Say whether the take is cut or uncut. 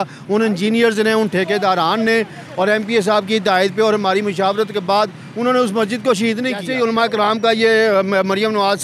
cut